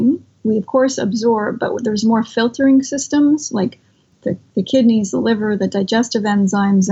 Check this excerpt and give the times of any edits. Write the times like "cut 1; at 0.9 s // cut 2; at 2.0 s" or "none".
cut 1; at 4.1 s

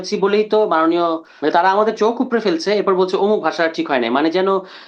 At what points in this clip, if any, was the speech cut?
cut 1; at 1.3 s

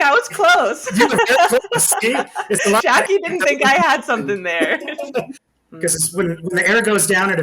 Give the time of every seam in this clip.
cut 1; at 5.4 s

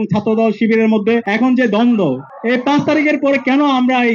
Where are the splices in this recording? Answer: cut 1; at 1.3 s // cut 2; at 2.3 s

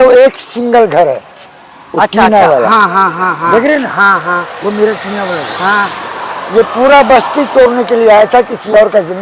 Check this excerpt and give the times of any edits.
none

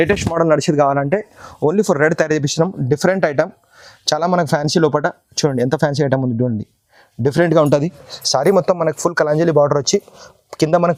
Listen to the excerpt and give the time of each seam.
none

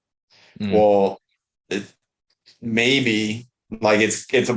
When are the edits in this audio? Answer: none

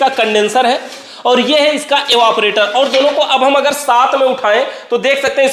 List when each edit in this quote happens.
none

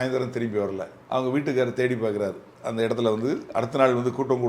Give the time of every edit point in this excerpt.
cut 1; at 0.9 s

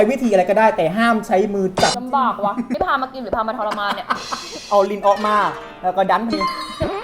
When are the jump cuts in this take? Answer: cut 1; at 2.0 s // cut 2; at 4.6 s

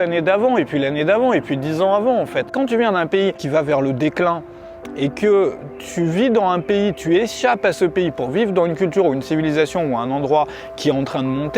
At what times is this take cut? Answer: cut 1; at 2.5 s // cut 2; at 3.4 s

